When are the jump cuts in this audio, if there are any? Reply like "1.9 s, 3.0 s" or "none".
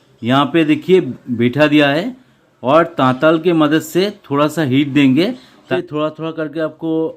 5.7 s